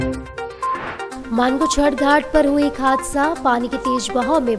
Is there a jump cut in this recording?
no; 0 cuts

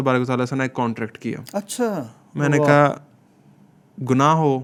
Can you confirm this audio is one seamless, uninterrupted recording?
yes; 0 cuts

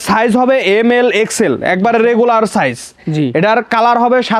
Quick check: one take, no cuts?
yes; 0 cuts

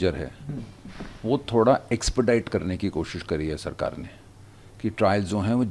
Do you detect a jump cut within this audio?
no; 0 cuts

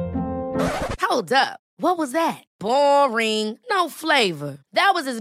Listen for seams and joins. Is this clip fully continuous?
yes; 0 cuts

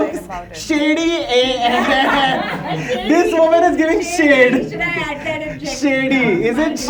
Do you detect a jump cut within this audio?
no; 0 cuts

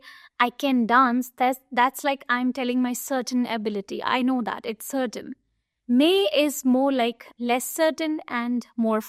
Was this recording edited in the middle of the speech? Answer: no; 0 cuts

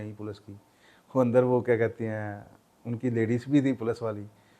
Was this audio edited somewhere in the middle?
no; 0 cuts

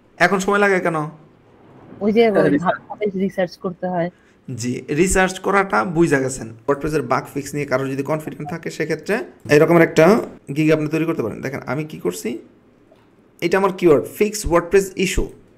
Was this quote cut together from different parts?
yes; 3 cuts; at 6.7 s, 9.4 s, 10.4 s

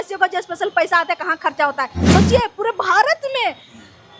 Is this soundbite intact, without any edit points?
no; 1 cut; at 2.1 s

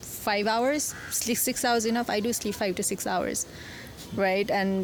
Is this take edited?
no; 0 cuts

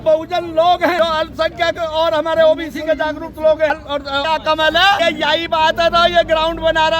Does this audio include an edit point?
yes; 3 cuts; at 1.0 s, 4.1 s, 5.0 s

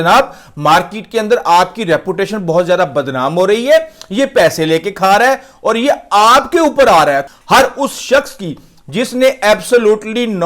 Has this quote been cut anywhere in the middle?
yes; 1 cut; at 7.2 s

